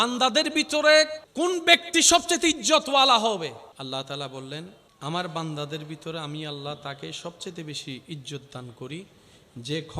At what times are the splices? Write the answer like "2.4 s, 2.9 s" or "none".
1.2 s, 3.7 s, 4.8 s

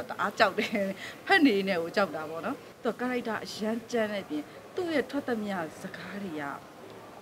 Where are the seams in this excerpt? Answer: 2.7 s

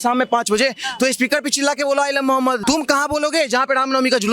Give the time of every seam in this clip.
2.6 s

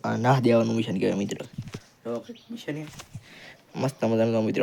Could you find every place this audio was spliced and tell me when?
none

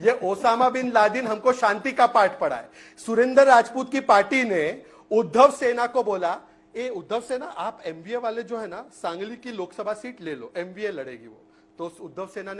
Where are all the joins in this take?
none

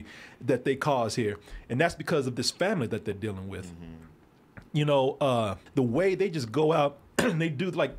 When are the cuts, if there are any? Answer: 5.6 s

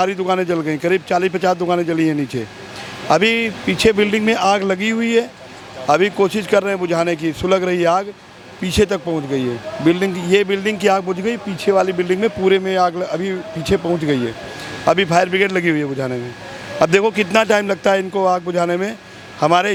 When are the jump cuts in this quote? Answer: none

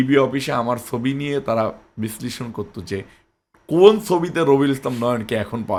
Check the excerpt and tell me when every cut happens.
none

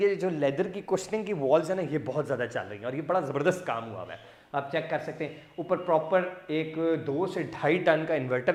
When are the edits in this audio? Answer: none

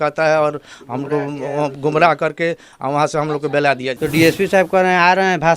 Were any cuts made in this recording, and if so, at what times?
3.9 s

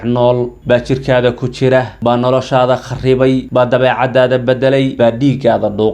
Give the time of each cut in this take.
1.9 s, 3.5 s, 4.9 s

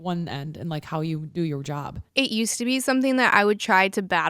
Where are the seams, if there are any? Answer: 2.0 s

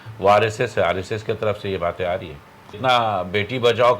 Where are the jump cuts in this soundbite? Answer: 2.8 s

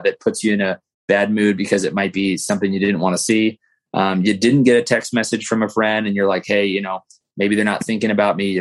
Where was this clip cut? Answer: none

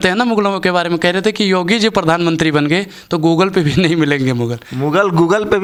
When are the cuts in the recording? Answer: none

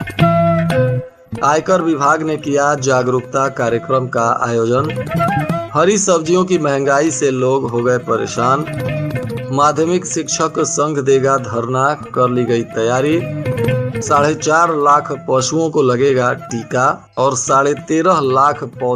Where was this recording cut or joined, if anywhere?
1.0 s

